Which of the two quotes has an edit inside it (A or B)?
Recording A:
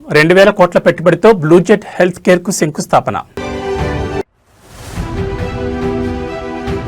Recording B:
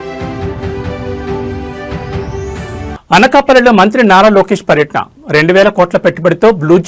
B